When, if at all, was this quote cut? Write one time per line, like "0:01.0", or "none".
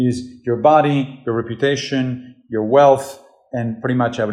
none